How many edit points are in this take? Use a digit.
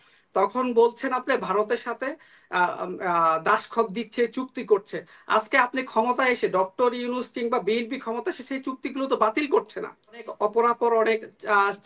1